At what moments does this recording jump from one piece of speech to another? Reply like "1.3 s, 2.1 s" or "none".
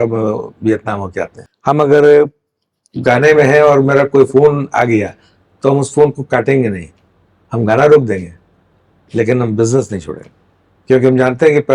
1.4 s